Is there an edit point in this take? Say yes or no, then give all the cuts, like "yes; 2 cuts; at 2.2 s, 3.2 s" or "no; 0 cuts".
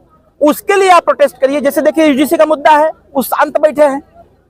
no; 0 cuts